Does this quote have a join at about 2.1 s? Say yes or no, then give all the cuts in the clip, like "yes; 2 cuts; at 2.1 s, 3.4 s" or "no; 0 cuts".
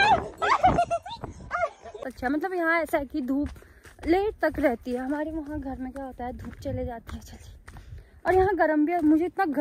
yes; 1 cut; at 2.1 s